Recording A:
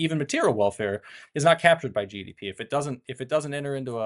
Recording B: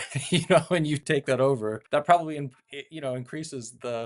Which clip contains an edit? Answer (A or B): B